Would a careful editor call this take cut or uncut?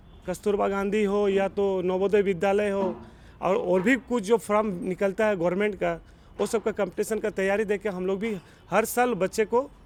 uncut